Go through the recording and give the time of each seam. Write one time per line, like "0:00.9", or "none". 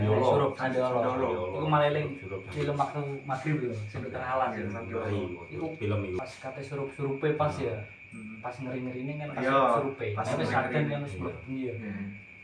0:06.2